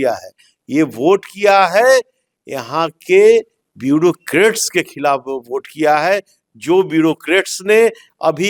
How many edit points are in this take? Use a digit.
0